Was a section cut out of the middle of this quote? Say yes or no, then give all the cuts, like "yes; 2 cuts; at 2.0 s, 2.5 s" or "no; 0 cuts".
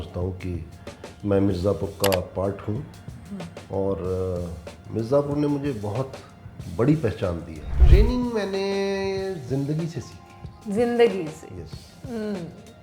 yes; 1 cut; at 7.7 s